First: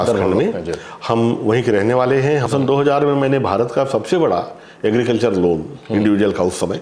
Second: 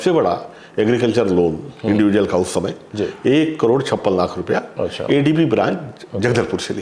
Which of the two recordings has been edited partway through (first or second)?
first